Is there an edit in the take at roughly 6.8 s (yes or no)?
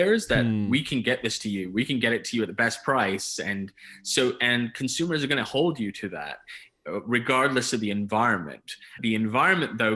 no